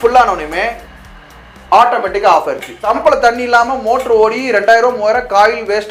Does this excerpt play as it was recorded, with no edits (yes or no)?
no